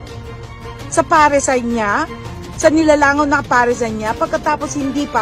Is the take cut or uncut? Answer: uncut